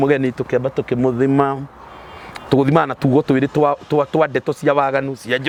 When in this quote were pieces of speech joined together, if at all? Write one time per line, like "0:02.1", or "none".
none